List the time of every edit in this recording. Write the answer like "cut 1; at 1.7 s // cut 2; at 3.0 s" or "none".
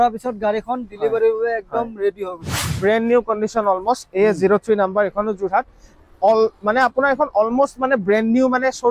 cut 1; at 2.6 s